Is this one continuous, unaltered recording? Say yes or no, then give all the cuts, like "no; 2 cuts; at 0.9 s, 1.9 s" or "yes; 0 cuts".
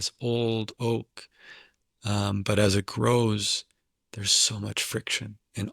yes; 0 cuts